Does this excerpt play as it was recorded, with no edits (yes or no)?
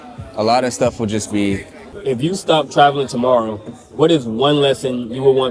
no